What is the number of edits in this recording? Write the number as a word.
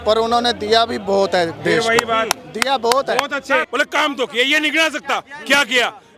one